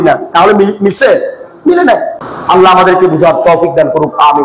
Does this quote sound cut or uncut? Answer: cut